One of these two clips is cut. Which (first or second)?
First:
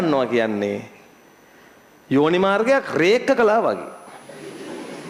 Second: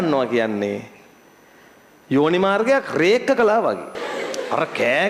second